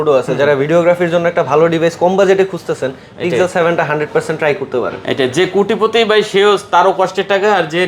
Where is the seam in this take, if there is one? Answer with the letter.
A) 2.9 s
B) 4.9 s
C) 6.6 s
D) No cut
D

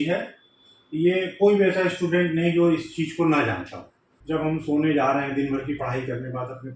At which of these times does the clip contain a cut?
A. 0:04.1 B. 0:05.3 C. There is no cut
A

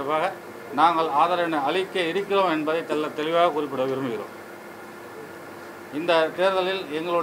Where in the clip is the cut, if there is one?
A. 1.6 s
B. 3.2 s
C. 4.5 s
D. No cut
D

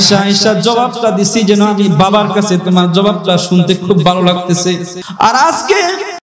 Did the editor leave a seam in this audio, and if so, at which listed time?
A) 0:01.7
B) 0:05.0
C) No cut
B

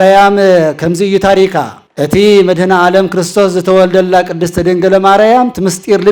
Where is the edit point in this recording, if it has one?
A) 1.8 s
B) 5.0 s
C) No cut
A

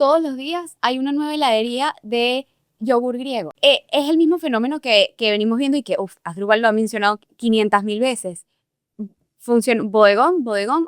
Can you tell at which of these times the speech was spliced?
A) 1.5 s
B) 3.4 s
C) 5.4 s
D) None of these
B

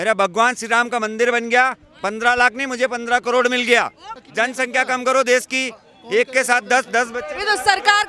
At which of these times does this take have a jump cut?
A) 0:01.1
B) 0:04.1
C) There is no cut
B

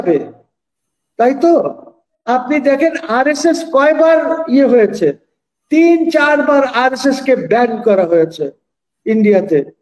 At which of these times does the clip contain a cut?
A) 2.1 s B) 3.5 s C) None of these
A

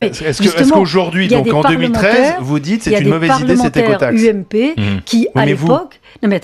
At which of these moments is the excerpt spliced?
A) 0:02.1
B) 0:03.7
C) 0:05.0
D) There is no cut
C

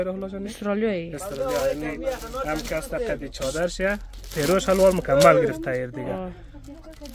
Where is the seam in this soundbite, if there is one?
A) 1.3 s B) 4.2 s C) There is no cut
C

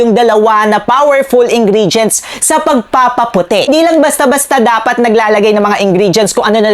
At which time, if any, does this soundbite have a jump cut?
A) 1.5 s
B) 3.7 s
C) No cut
B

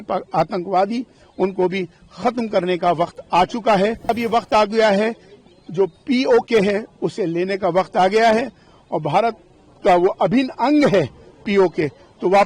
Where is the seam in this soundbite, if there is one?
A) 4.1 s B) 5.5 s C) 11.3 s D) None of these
A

